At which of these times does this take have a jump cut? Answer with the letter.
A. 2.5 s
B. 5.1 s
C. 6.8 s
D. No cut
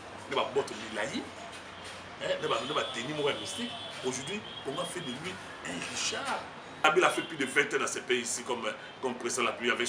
C